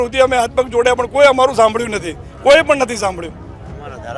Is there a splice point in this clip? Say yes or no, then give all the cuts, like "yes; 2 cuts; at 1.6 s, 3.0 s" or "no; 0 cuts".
no; 0 cuts